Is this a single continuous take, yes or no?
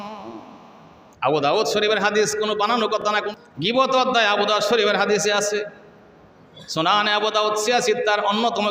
no